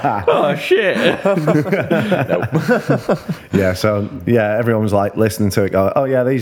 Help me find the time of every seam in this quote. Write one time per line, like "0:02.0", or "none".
none